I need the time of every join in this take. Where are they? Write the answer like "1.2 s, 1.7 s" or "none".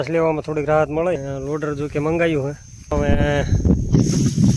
1.2 s, 2.9 s